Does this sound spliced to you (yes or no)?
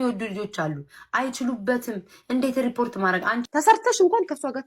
yes